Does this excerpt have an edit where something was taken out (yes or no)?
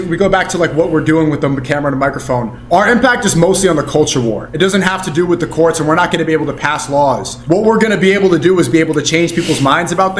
yes